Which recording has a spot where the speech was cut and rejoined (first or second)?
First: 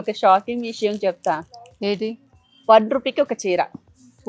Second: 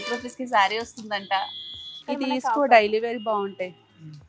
second